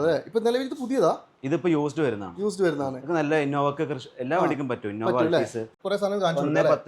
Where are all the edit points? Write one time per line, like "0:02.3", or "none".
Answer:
0:05.8